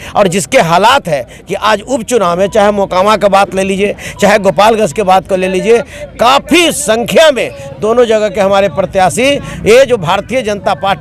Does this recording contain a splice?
no; 0 cuts

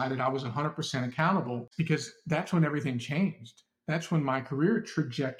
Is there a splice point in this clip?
no; 0 cuts

